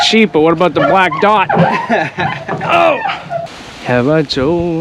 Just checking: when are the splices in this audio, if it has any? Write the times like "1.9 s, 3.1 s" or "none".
3.4 s